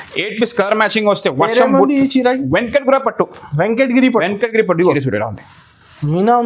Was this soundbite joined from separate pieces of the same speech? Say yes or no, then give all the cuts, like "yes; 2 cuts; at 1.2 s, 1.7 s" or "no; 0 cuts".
yes; 1 cut; at 4.8 s